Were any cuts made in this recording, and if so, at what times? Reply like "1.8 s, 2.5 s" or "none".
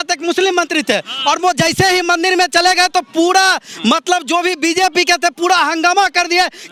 none